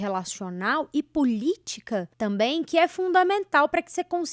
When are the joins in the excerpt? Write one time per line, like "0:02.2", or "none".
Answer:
0:02.1